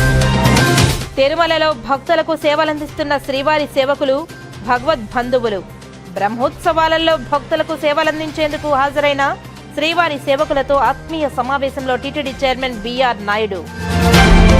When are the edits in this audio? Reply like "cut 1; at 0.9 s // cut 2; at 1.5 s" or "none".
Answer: cut 1; at 1.0 s

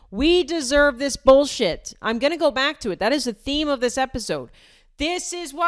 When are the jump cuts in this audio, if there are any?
none

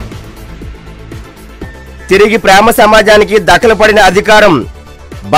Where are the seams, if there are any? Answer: cut 1; at 1.8 s

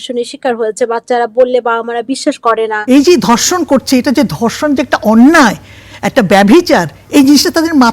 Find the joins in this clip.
cut 1; at 2.8 s

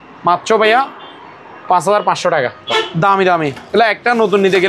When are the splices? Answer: cut 1; at 2.6 s

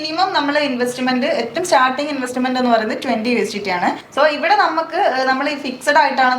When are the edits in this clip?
cut 1; at 4.0 s

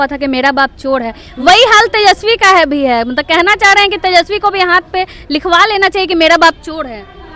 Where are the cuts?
none

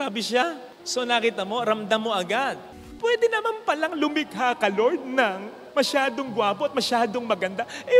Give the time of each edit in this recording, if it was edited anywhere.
cut 1; at 2.7 s

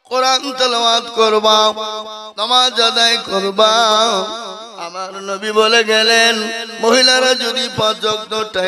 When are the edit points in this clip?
none

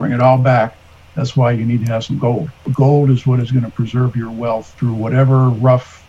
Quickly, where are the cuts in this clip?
cut 1; at 2.7 s // cut 2; at 4.7 s

